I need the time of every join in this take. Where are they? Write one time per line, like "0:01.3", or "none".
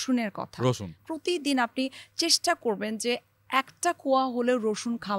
0:01.0